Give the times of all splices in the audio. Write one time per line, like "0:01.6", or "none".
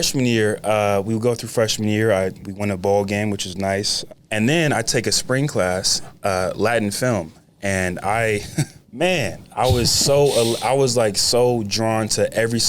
0:02.4
0:04.0